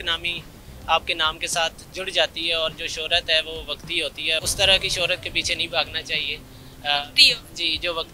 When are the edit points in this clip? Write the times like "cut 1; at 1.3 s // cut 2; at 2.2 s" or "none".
cut 1; at 4.5 s